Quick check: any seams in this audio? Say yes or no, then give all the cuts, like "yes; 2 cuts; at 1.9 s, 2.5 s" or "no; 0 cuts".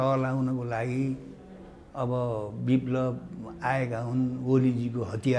no; 0 cuts